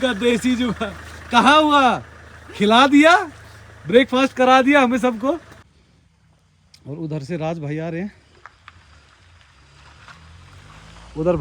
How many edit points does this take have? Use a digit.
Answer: 1